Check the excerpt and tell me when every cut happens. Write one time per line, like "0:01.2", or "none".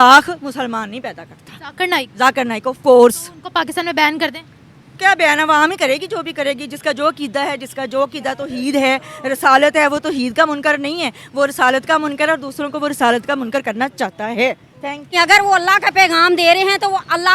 0:15.1